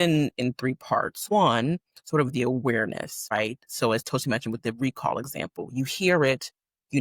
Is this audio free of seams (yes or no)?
no